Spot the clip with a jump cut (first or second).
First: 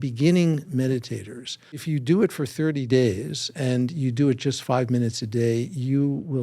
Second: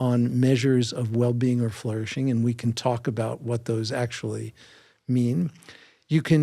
first